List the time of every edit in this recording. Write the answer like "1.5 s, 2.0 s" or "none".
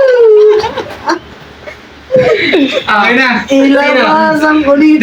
none